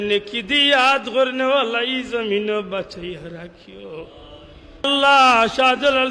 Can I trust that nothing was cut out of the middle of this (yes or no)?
no